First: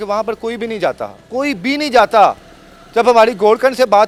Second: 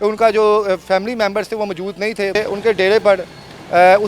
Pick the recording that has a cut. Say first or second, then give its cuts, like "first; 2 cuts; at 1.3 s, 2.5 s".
second; 1 cut; at 2.4 s